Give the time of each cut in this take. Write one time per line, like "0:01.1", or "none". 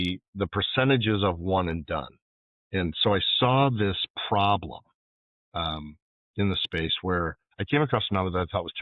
0:07.5